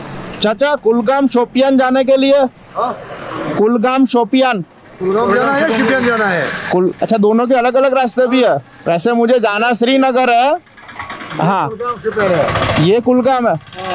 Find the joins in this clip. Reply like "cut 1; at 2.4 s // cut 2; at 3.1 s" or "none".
none